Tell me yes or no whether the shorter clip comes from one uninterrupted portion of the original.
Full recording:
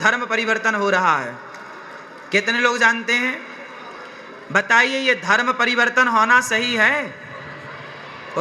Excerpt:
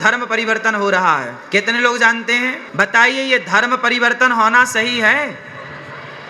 no